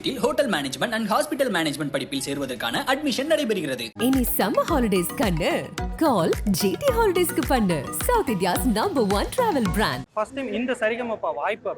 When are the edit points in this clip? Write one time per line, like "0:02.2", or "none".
0:10.1